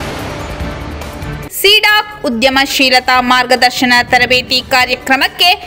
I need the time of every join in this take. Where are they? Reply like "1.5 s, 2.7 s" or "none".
1.0 s